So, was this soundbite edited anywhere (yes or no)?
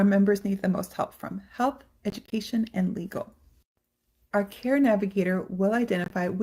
yes